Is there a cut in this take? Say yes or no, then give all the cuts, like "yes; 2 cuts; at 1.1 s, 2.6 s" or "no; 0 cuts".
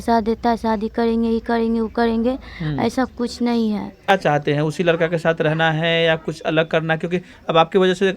yes; 1 cut; at 4.1 s